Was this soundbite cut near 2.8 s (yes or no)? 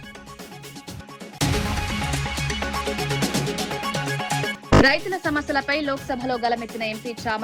no